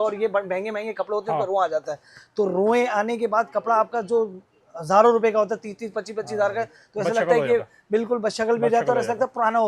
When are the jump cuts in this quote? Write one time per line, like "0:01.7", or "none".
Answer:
none